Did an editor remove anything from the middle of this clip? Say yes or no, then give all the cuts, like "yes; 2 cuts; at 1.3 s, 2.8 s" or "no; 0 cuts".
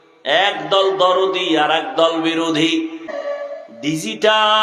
yes; 1 cut; at 3.1 s